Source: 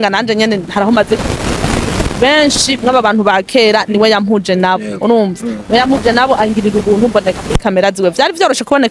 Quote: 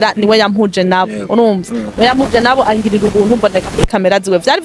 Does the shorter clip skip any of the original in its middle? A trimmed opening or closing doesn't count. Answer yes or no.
no